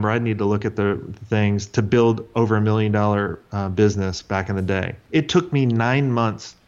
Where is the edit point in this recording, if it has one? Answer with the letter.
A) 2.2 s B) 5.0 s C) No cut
B